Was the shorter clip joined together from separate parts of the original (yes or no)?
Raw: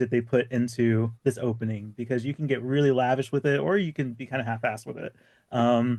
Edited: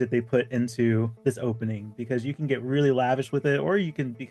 no